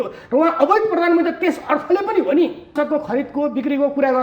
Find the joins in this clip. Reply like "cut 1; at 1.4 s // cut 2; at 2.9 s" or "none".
cut 1; at 2.7 s